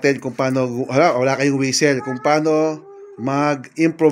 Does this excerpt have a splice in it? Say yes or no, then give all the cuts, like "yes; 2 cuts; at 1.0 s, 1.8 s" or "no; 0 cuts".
no; 0 cuts